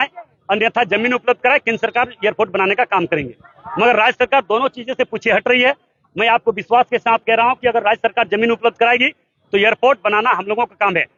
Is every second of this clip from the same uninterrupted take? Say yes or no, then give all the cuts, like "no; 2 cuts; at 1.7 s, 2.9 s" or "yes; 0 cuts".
yes; 0 cuts